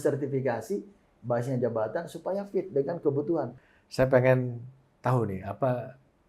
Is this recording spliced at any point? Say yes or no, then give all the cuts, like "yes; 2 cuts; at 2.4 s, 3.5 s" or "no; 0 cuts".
yes; 1 cut; at 3.5 s